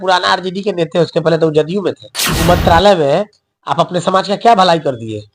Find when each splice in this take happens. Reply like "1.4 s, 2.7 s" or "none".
2.4 s